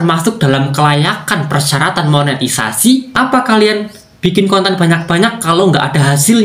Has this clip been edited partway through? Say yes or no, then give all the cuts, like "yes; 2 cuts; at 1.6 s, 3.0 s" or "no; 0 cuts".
yes; 1 cut; at 3.1 s